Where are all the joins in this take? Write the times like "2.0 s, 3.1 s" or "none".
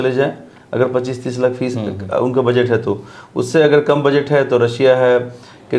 none